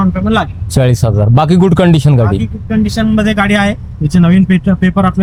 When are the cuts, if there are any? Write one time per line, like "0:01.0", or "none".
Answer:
none